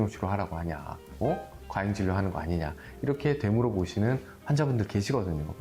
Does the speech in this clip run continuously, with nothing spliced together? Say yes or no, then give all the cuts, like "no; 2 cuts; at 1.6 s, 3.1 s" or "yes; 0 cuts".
yes; 0 cuts